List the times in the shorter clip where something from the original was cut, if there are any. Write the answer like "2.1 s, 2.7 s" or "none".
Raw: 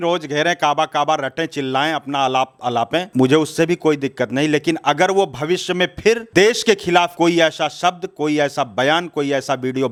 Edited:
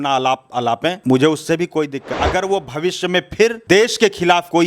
2.1 s